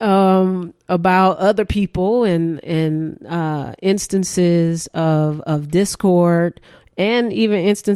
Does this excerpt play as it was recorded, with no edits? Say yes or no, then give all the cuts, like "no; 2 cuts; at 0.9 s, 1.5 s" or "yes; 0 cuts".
yes; 0 cuts